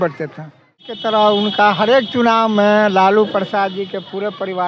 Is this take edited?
yes; 1 cut; at 0.9 s

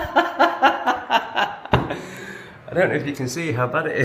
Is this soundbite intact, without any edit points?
yes; 0 cuts

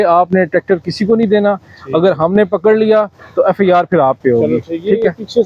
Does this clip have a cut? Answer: no; 0 cuts

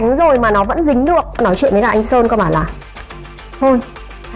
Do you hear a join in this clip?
yes; 1 cut; at 1.3 s

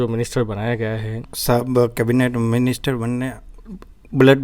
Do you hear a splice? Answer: yes; 1 cut; at 1.3 s

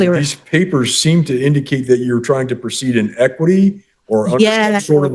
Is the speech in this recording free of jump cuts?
yes; 0 cuts

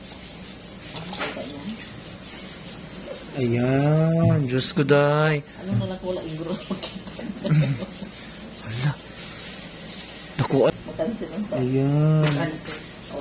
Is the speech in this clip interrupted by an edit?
yes; 1 cut; at 10.7 s

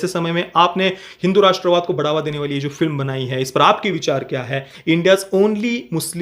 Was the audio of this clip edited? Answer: yes; 1 cut; at 4.6 s

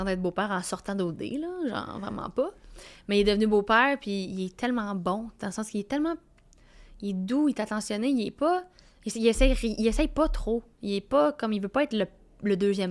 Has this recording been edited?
no; 0 cuts

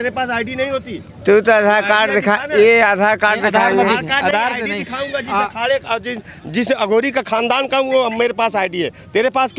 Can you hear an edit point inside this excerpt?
no; 0 cuts

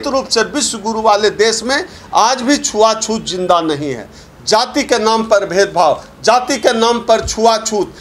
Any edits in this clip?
no; 0 cuts

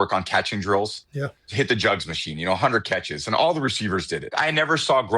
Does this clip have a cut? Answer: yes; 2 cuts; at 1.5 s, 4.2 s

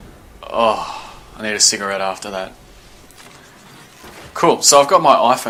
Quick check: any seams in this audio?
no; 0 cuts

